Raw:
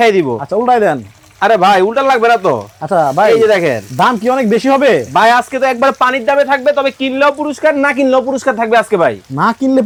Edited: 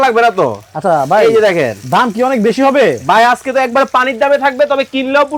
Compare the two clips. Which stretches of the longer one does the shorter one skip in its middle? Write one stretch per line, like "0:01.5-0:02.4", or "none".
none